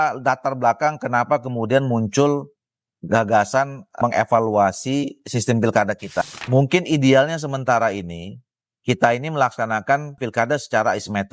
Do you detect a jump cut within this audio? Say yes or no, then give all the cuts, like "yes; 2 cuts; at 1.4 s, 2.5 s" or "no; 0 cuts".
yes; 1 cut; at 6.2 s